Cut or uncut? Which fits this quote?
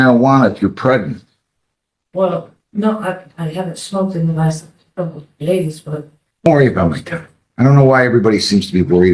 cut